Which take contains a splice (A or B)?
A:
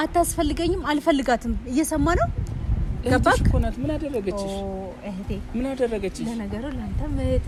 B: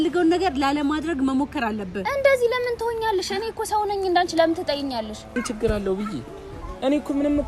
B